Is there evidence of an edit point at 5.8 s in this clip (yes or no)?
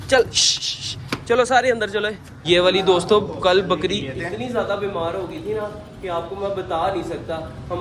no